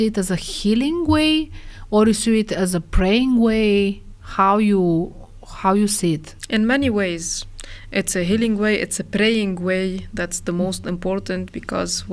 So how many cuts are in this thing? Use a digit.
0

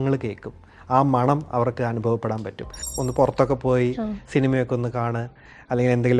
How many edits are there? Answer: 1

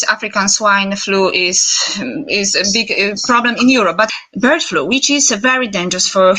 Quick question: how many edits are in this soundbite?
1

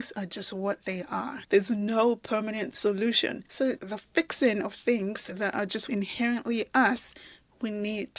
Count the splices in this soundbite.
1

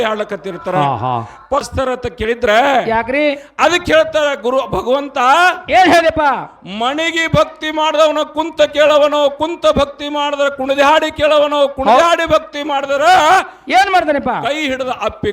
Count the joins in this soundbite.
1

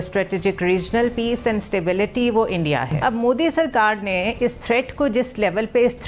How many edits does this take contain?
1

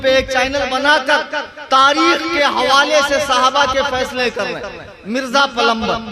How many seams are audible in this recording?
0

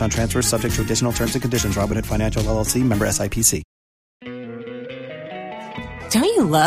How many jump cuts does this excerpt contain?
1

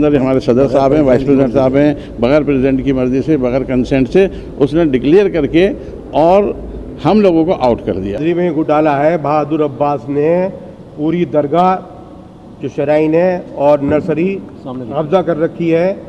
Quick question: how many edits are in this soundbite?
1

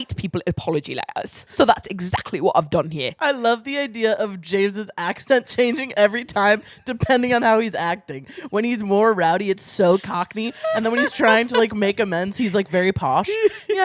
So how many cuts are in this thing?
2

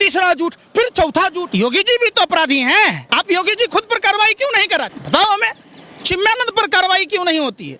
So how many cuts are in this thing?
3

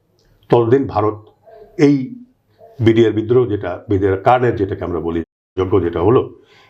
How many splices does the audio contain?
0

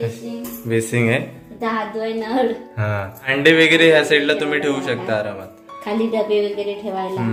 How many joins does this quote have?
1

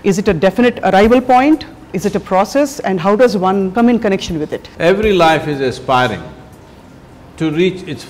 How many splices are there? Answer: 2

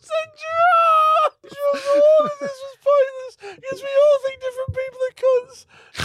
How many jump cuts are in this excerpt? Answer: 1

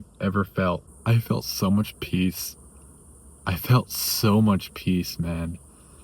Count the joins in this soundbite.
1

